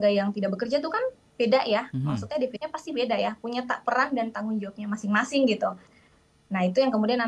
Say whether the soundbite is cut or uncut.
cut